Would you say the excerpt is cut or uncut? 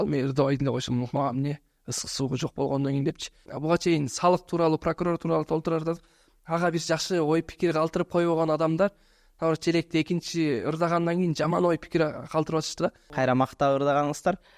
cut